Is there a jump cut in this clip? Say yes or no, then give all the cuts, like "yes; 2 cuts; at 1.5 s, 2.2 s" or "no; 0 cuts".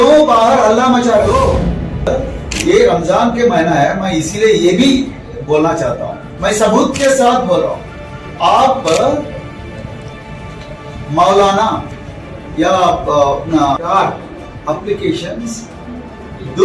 yes; 1 cut; at 2.1 s